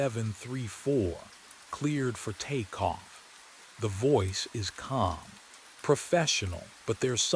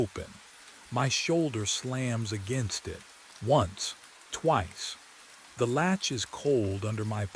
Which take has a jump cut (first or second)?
first